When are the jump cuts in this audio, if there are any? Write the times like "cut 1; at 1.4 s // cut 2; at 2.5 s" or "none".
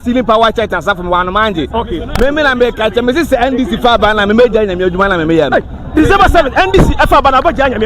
none